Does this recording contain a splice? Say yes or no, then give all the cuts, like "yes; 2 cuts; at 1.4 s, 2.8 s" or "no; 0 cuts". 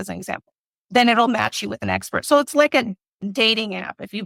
no; 0 cuts